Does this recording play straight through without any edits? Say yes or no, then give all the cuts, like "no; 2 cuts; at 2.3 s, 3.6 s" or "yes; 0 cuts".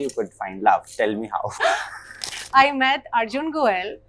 no; 1 cut; at 2.4 s